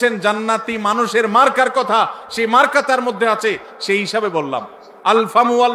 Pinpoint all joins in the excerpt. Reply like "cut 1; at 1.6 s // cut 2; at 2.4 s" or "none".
cut 1; at 4.8 s

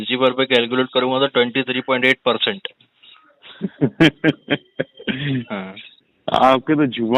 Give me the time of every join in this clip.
none

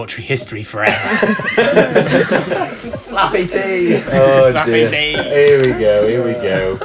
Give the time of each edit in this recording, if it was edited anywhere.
none

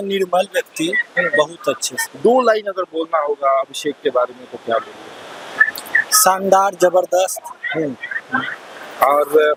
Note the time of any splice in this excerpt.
none

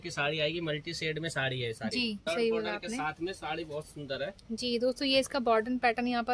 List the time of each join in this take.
cut 1; at 2.3 s

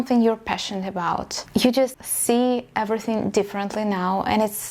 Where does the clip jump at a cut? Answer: cut 1; at 1.5 s // cut 2; at 2.1 s

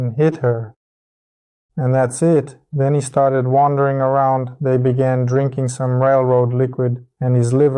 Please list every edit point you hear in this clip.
none

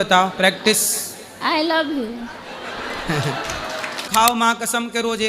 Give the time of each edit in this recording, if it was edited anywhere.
cut 1; at 4.1 s

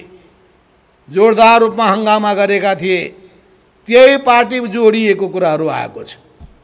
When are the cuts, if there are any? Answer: none

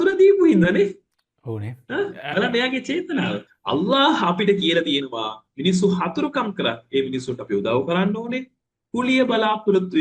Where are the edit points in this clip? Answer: cut 1; at 3.5 s

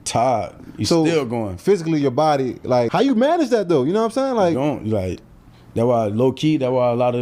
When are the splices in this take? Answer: cut 1; at 2.9 s

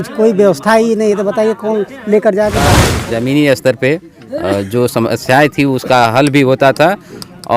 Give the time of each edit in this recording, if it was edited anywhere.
cut 1; at 2.9 s

